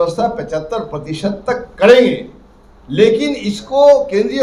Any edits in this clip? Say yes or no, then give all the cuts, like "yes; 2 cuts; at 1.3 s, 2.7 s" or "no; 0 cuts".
no; 0 cuts